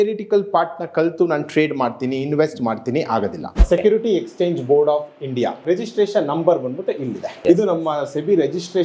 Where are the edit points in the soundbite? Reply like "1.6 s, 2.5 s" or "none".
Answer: 3.7 s, 5.6 s, 7.4 s